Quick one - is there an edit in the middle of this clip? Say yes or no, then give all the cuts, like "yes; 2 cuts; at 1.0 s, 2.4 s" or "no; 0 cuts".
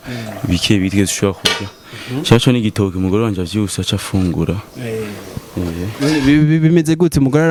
no; 0 cuts